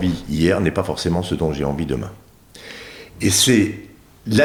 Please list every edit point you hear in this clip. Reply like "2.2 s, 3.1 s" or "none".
none